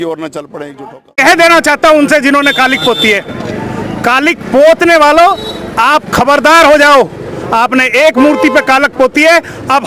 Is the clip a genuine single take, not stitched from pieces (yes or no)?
no